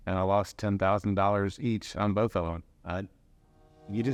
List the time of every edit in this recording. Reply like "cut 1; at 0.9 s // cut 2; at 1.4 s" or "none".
none